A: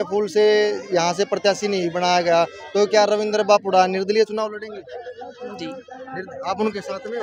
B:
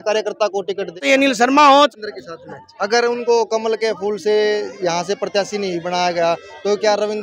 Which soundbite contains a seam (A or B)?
B